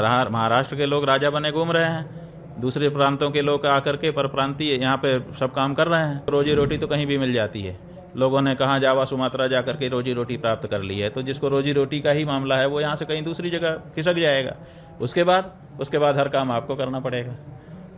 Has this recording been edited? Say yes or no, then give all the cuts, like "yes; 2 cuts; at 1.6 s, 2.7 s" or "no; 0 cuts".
yes; 1 cut; at 6.3 s